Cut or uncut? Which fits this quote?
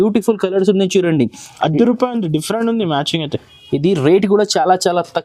uncut